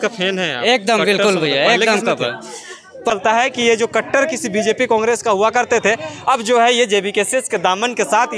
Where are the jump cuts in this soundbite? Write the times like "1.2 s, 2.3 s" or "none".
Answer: none